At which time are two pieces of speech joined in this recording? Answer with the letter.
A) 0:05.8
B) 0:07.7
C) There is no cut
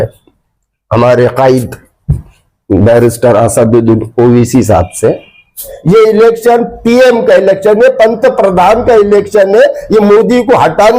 A